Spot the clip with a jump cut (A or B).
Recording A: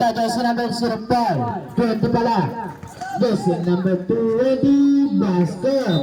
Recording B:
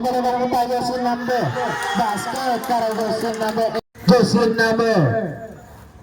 B